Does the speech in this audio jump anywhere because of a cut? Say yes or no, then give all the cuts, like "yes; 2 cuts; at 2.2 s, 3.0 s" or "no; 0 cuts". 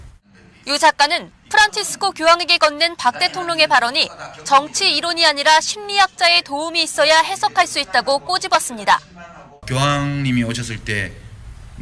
no; 0 cuts